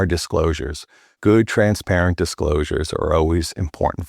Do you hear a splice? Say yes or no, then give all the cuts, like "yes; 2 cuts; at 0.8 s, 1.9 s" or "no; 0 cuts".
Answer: no; 0 cuts